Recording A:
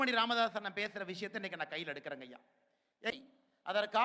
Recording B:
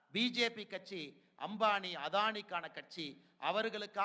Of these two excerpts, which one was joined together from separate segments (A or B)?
A